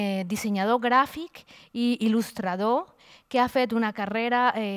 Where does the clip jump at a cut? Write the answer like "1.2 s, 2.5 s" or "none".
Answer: none